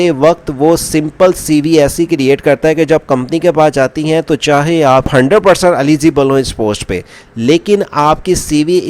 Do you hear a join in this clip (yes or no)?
yes